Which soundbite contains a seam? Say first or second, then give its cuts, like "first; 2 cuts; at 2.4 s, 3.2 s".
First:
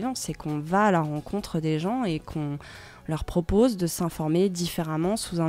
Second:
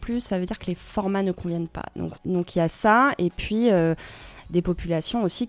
second; 1 cut; at 2.1 s